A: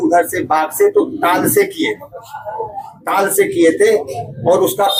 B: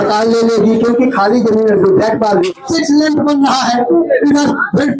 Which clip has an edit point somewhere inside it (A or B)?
B